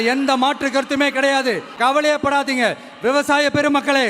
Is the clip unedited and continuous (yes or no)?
no